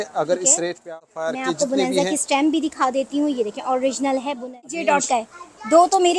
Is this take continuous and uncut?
no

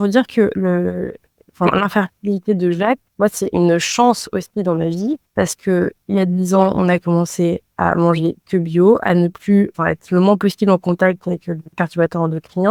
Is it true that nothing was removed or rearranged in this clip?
no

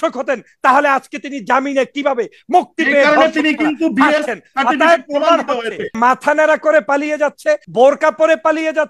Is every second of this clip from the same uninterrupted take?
no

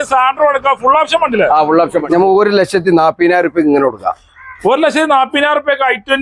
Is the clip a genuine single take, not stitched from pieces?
no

